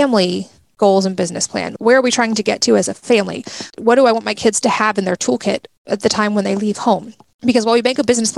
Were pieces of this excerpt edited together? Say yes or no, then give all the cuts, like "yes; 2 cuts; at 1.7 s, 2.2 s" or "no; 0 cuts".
yes; 1 cut; at 1.7 s